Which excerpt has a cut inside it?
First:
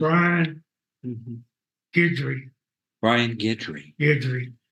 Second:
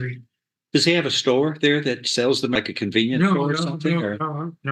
second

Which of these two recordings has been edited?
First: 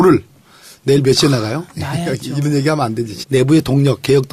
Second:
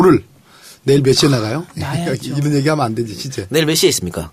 second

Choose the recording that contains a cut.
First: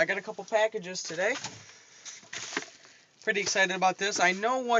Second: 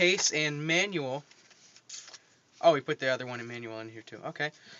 second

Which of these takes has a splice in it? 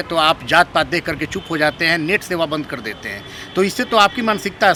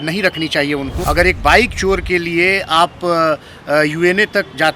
second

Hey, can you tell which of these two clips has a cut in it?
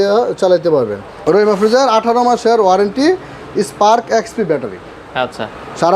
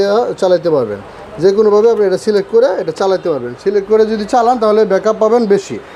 first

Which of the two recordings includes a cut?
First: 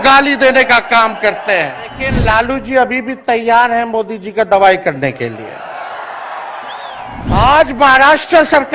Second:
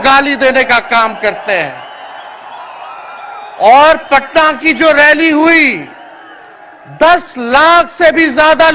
first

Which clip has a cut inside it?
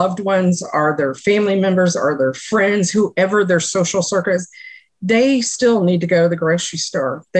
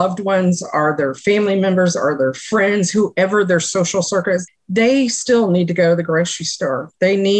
second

